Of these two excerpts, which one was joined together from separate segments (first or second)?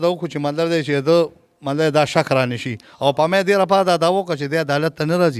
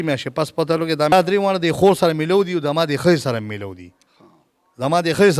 second